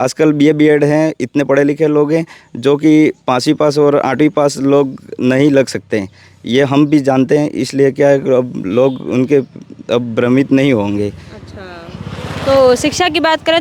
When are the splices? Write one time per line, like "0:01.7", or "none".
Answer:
none